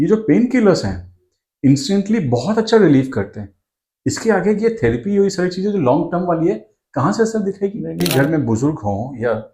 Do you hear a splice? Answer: yes; 1 cut; at 8.0 s

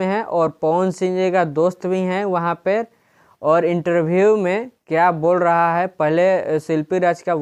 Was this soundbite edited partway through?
no; 0 cuts

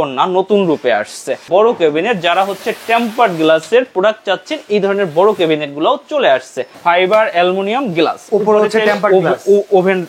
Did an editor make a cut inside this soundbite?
yes; 2 cuts; at 1.4 s, 6.6 s

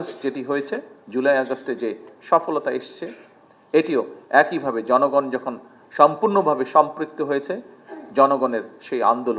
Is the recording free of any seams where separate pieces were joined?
yes; 0 cuts

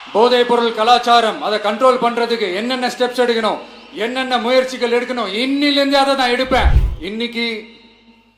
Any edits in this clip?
yes; 1 cut; at 6.9 s

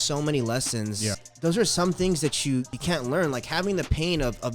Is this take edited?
yes; 2 cuts; at 1.2 s, 2.7 s

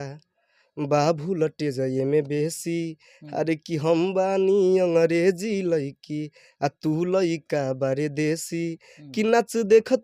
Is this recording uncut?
yes; 0 cuts

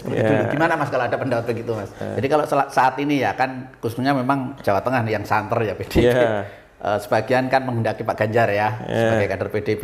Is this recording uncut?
no; 1 cut; at 2.0 s

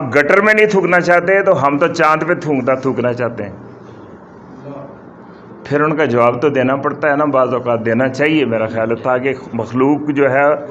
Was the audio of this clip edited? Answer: no; 0 cuts

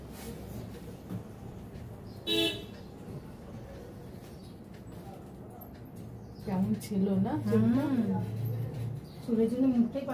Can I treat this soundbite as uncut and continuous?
yes; 0 cuts

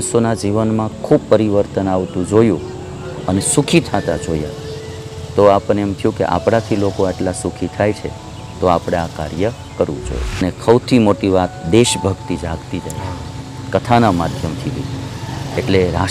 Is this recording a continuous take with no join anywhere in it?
no; 1 cut; at 10.4 s

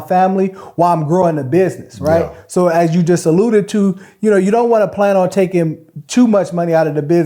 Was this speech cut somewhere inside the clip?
no; 0 cuts

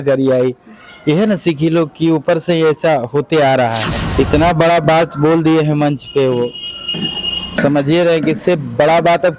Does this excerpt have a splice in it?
yes; 1 cut; at 4.0 s

